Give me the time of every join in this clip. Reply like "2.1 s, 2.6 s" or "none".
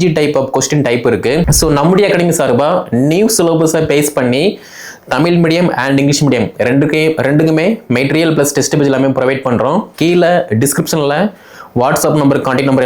1.5 s